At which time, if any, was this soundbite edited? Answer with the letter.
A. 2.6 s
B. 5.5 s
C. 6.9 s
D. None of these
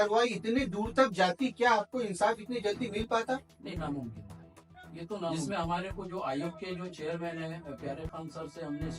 B